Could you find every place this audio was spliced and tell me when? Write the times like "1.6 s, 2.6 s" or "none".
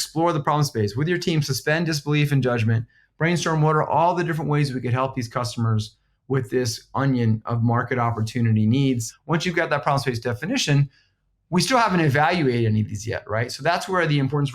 9.1 s